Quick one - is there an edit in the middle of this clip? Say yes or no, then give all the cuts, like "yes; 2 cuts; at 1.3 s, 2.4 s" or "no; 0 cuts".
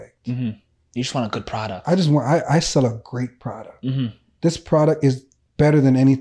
no; 0 cuts